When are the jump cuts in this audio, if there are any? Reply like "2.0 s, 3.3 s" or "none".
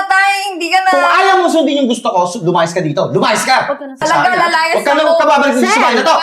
4.0 s